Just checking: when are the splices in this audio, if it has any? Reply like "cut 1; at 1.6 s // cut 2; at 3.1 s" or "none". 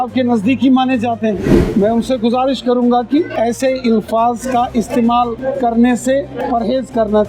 cut 1; at 1.6 s // cut 2; at 3.3 s // cut 3; at 5.4 s // cut 4; at 6.4 s